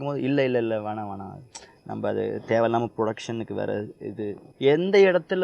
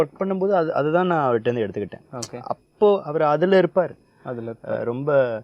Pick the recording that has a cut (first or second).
first